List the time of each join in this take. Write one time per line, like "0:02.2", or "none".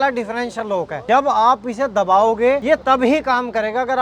0:01.0
0:02.8